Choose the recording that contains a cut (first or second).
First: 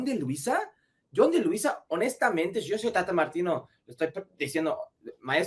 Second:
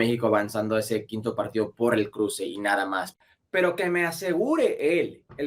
second